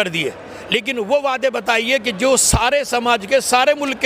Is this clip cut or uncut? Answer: uncut